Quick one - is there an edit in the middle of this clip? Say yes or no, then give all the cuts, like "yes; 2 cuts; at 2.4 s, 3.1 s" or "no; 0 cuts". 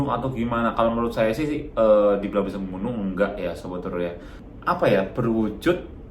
yes; 1 cut; at 4.3 s